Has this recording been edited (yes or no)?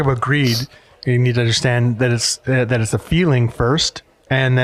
no